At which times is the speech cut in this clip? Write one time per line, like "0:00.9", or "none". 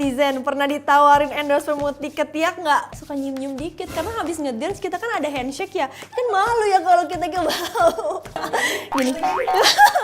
0:02.9
0:08.4